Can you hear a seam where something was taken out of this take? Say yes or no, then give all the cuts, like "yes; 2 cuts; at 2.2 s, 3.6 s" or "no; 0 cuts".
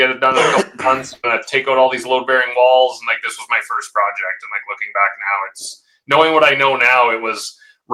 no; 0 cuts